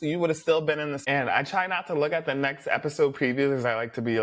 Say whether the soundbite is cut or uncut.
uncut